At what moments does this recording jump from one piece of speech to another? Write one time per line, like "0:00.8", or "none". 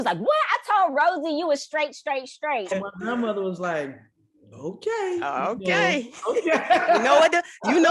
0:02.7